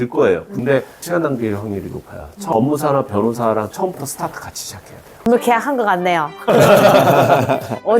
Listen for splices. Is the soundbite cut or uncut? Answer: cut